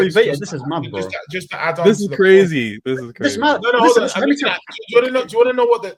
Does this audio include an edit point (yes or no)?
no